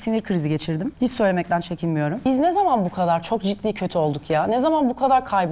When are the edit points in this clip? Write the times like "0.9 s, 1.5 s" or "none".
0.9 s, 2.2 s